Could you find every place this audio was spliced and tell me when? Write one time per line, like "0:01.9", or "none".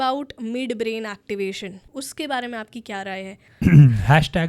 0:01.9
0:03.4

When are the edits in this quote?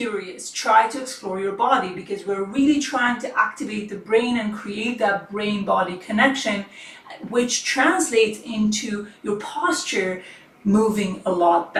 none

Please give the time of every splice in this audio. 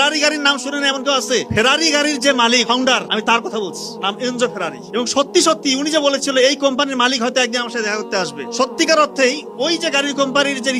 0:01.5

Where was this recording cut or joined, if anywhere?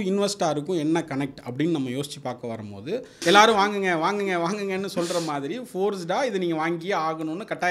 0:03.1

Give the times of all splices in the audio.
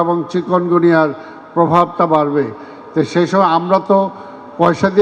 none

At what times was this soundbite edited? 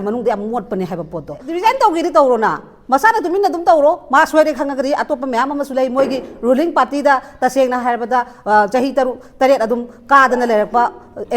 0:01.5

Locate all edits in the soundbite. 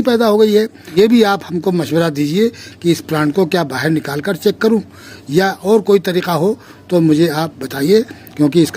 0:00.9

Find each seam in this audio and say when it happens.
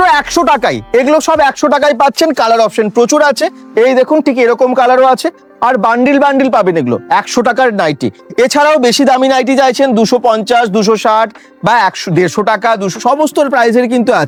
none

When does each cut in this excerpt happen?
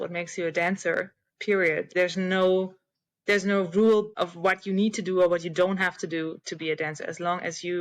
0:01.9
0:04.2

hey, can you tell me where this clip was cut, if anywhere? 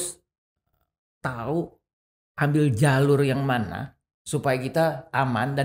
none

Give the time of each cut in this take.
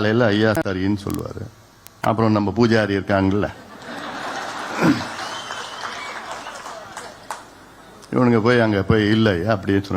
none

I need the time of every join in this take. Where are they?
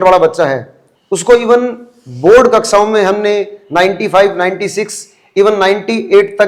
none

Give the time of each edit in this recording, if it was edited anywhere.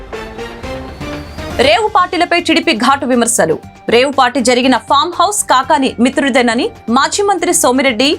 0:01.5

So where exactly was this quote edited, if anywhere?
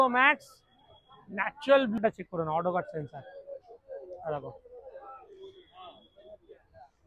0:02.0

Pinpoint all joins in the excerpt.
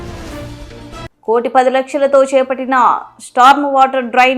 0:01.1

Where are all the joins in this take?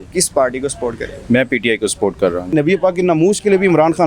0:02.4

